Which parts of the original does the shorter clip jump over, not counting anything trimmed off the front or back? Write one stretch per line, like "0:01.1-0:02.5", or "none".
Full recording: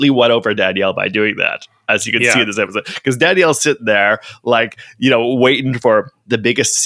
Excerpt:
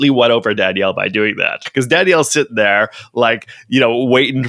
0:01.6-0:02.9